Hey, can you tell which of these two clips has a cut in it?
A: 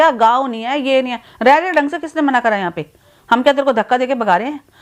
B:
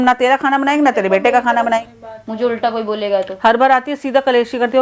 B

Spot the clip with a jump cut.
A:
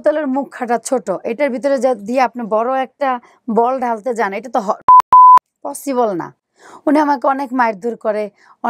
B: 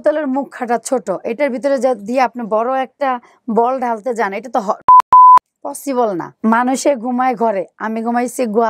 B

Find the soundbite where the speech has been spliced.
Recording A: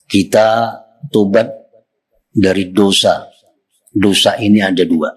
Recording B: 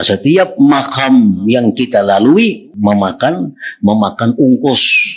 B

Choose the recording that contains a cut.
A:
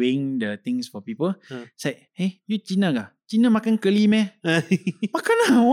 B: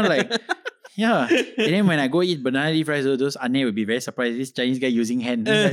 A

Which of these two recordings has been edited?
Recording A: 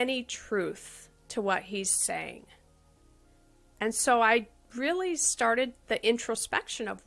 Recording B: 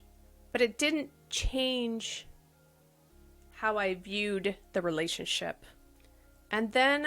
B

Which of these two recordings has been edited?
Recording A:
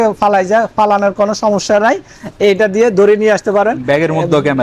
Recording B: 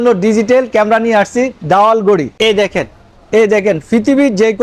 B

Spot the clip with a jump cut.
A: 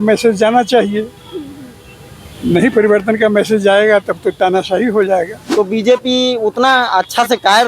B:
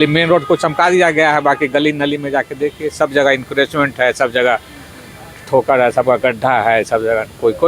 A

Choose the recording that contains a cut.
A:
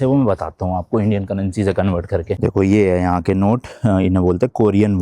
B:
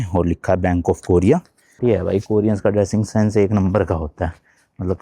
B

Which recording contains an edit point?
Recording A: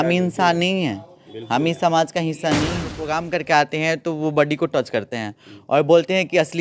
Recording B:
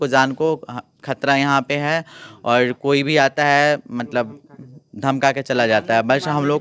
A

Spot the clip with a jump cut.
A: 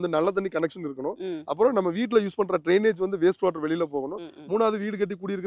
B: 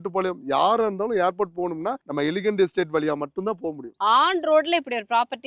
B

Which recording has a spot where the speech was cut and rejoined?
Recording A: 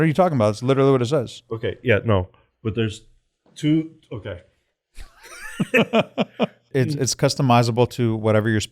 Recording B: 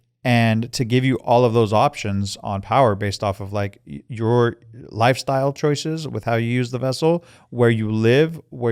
A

